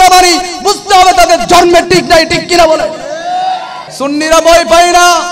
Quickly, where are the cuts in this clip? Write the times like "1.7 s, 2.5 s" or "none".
3.8 s